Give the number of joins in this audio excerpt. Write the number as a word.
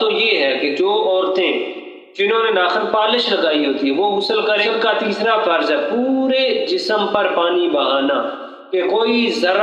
one